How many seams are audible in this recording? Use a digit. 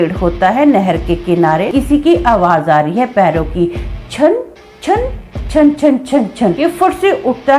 2